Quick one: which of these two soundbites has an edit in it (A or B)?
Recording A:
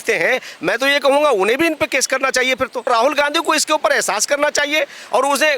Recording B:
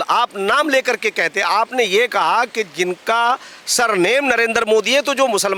A